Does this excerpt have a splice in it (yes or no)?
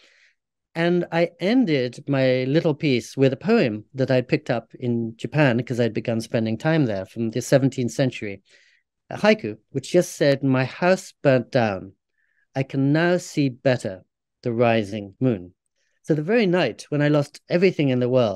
no